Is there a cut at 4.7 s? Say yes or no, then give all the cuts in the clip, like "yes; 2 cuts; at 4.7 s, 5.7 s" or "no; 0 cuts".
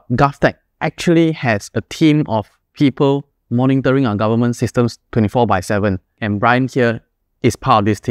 no; 2 cuts; at 2.6 s, 6.2 s